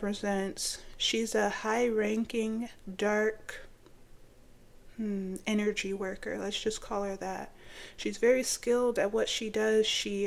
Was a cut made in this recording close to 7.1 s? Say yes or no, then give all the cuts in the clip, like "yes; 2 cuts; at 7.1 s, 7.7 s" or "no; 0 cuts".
no; 0 cuts